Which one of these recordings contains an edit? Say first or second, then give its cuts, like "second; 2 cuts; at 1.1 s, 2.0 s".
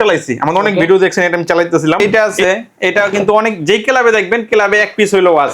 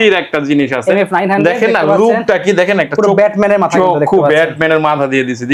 first; 1 cut; at 2.0 s